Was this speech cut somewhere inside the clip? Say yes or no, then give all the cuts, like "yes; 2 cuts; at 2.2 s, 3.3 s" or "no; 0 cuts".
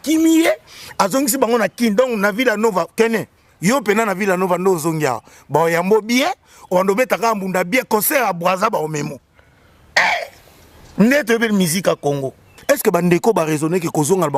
yes; 1 cut; at 12.5 s